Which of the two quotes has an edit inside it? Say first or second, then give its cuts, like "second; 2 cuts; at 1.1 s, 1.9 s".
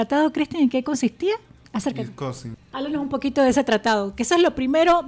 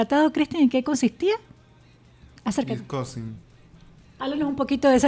first; 2 cuts; at 1.6 s, 2.5 s